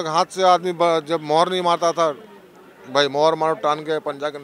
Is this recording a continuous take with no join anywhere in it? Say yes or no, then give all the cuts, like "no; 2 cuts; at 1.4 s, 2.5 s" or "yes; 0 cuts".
yes; 0 cuts